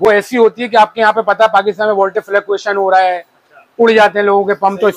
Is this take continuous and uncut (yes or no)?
yes